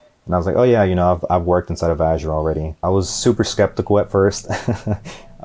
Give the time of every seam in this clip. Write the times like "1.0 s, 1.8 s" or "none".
2.8 s